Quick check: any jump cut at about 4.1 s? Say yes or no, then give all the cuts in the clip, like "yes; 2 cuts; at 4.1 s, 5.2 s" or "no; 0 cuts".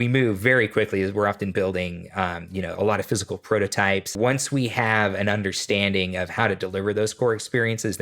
yes; 1 cut; at 4.1 s